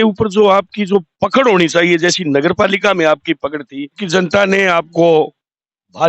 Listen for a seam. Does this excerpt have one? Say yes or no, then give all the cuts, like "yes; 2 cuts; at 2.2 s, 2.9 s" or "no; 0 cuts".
yes; 1 cut; at 4.0 s